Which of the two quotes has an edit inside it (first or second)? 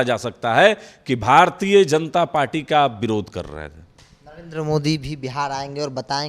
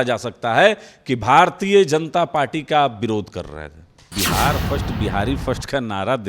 second